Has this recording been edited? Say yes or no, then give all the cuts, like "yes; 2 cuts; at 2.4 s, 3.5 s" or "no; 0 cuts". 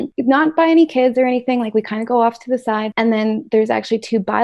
yes; 1 cut; at 2.9 s